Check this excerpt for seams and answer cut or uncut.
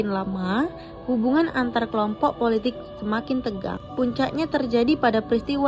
cut